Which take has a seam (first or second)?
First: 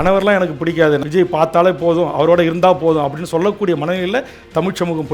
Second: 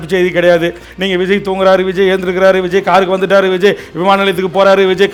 first